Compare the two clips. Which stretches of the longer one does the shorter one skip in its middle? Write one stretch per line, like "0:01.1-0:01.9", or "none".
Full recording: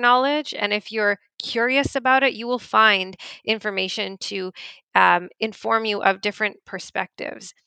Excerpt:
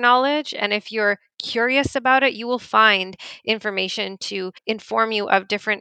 0:04.6-0:05.3